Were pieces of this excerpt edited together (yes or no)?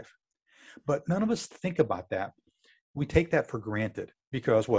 no